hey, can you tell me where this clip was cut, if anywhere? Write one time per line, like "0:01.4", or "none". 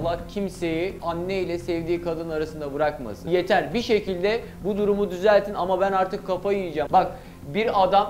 0:01.0
0:03.2
0:06.8

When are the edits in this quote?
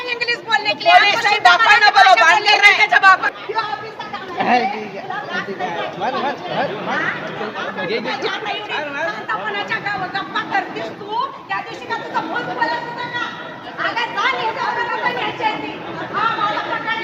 0:03.2

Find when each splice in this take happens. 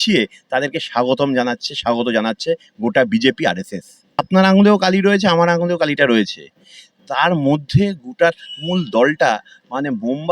0:04.2

